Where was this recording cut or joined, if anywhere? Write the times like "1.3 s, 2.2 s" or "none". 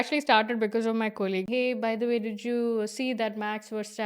1.5 s